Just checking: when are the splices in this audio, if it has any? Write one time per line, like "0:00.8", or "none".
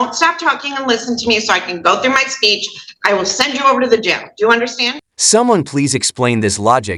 none